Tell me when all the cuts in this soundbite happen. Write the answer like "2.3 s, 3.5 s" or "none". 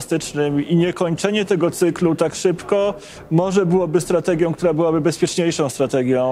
none